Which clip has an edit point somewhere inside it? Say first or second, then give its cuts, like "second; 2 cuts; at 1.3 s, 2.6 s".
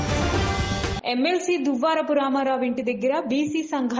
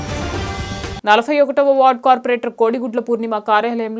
first; 1 cut; at 0.9 s